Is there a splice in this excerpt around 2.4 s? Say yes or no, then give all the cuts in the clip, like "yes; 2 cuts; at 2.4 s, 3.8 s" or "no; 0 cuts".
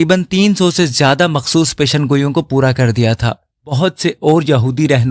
no; 1 cut; at 3.8 s